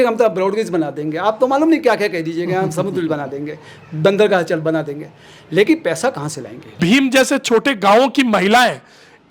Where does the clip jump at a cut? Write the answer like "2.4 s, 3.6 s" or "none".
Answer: 6.7 s